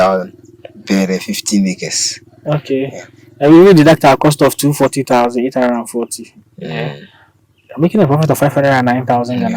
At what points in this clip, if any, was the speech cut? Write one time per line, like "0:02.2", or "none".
none

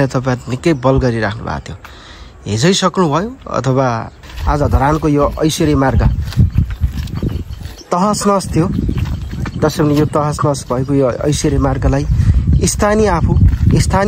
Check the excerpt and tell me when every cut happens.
0:04.3

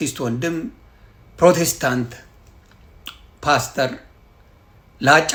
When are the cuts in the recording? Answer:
none

